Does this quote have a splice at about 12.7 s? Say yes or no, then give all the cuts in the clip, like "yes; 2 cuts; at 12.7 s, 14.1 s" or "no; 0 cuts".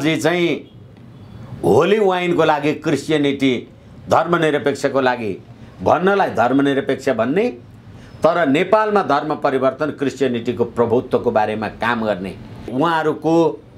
yes; 1 cut; at 12.7 s